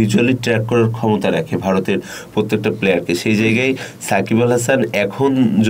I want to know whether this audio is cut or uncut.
uncut